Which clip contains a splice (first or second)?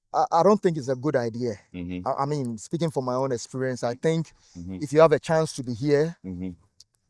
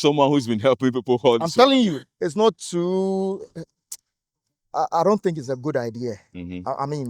second